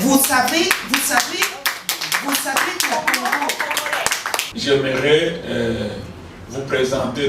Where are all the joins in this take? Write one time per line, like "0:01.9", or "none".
0:04.4